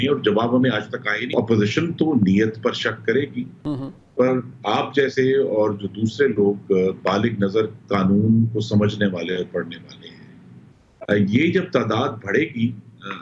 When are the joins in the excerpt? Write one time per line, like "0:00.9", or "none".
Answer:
0:01.3